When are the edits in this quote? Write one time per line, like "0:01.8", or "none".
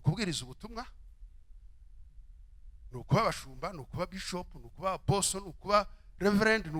none